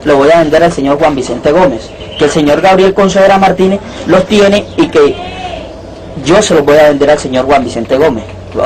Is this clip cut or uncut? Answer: uncut